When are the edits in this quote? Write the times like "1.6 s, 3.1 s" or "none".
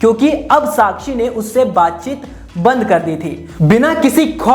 3.6 s